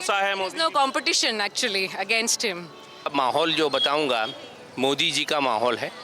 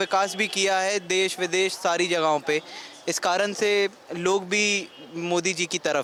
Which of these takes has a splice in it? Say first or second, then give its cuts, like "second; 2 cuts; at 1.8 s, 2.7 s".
first; 1 cut; at 3.1 s